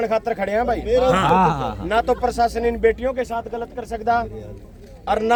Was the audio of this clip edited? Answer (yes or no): no